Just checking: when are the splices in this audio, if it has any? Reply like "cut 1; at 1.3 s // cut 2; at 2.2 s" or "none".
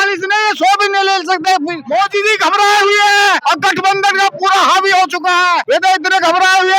cut 1; at 1.8 s // cut 2; at 3.4 s // cut 3; at 5.6 s